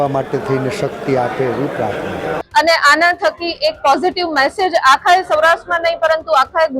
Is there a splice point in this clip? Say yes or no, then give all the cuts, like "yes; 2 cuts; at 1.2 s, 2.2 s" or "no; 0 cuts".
yes; 1 cut; at 2.4 s